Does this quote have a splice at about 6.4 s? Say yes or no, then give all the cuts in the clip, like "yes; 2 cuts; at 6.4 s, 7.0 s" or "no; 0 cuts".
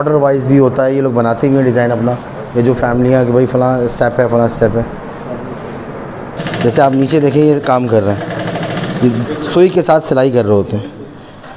yes; 1 cut; at 6.4 s